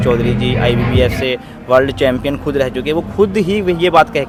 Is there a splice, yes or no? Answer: no